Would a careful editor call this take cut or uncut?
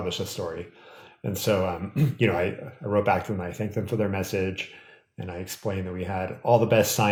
uncut